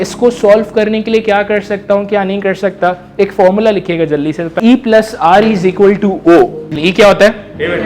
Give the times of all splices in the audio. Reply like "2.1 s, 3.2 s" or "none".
4.6 s, 6.7 s